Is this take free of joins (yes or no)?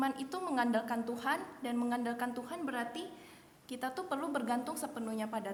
yes